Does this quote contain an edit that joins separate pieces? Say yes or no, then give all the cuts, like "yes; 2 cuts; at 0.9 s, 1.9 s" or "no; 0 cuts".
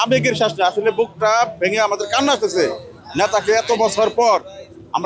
no; 0 cuts